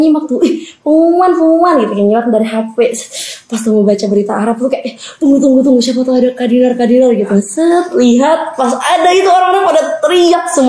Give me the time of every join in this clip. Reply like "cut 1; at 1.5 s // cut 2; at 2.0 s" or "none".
none

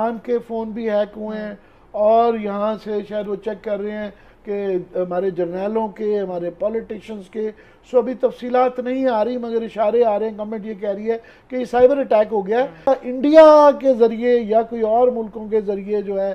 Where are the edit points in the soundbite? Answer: none

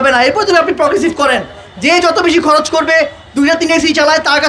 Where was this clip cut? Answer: none

